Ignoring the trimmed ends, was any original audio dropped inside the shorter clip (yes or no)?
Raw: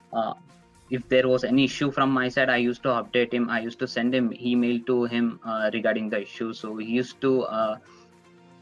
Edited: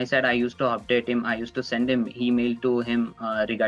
no